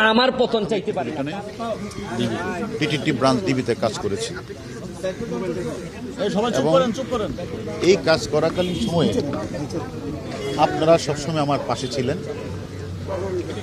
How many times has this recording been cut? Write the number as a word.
one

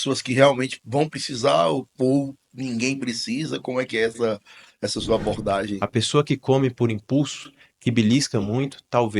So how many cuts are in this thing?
one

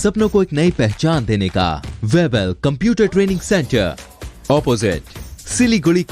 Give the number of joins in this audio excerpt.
one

